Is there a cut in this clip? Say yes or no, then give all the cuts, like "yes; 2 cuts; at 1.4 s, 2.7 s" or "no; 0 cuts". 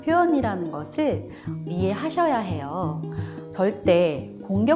no; 0 cuts